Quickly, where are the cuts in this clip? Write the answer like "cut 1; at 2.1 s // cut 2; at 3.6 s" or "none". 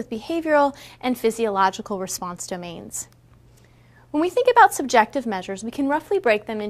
cut 1; at 4.2 s